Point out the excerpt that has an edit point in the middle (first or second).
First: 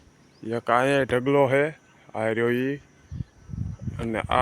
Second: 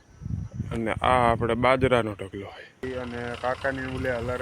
second